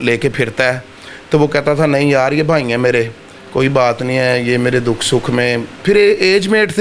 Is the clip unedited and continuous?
yes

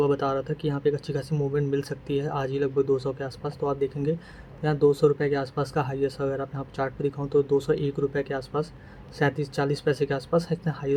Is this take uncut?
yes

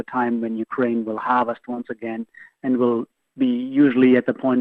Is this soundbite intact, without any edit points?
yes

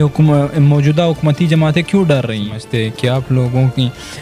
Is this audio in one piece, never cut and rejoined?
no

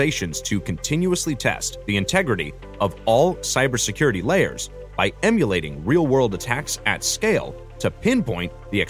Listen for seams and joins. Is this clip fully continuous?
yes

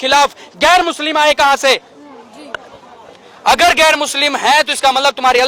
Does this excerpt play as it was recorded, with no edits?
yes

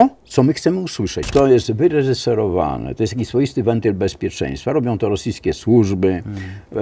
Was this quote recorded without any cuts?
no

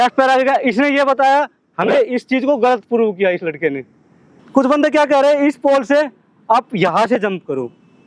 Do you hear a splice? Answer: yes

